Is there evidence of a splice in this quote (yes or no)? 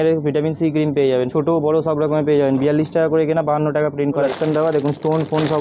yes